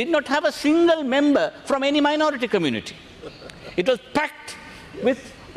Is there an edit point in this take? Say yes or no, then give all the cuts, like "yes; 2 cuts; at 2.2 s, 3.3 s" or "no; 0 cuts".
no; 0 cuts